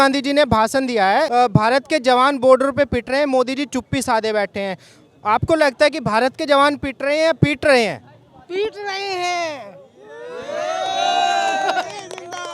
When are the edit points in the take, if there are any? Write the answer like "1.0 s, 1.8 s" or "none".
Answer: 1.3 s